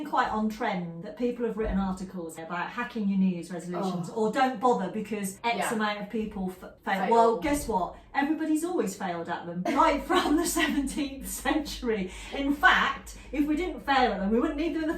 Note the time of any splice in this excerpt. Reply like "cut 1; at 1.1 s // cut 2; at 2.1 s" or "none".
cut 1; at 1.0 s // cut 2; at 2.3 s // cut 3; at 5.3 s // cut 4; at 6.7 s // cut 5; at 9.6 s